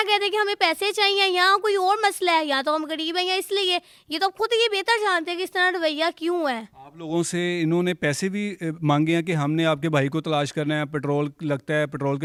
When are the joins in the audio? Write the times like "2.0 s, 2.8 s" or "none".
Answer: none